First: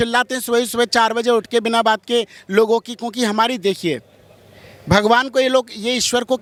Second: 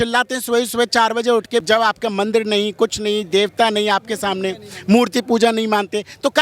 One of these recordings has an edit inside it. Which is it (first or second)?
second